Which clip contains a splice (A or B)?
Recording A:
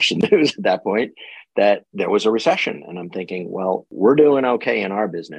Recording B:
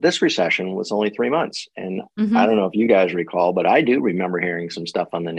A